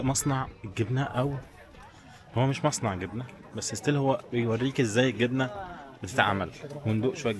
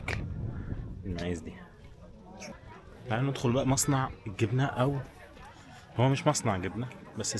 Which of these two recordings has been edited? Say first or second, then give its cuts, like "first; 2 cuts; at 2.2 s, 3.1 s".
second; 1 cut; at 2.5 s